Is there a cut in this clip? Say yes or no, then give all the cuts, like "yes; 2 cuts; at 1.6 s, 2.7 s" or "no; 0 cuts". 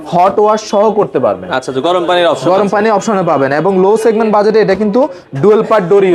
no; 0 cuts